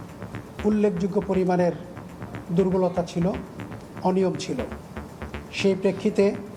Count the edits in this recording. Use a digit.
0